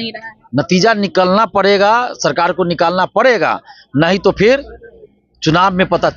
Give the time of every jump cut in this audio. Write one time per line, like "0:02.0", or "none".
none